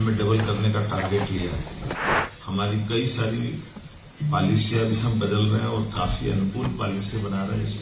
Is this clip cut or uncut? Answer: cut